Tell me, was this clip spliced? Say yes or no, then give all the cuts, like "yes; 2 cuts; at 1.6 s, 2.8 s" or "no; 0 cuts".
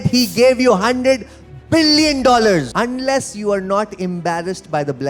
yes; 1 cut; at 2.7 s